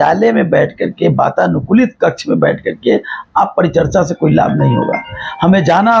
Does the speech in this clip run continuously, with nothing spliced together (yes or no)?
yes